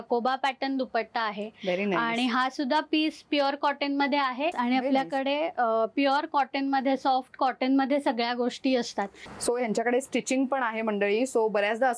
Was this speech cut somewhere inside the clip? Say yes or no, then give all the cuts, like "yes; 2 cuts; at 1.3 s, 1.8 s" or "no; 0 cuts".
yes; 2 cuts; at 4.5 s, 9.2 s